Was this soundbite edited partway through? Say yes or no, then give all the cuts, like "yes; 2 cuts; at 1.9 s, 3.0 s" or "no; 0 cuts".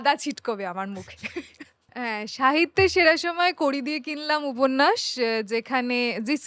yes; 1 cut; at 1.9 s